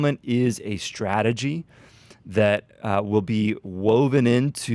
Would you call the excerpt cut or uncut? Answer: uncut